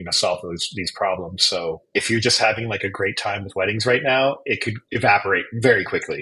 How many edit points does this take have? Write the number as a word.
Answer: zero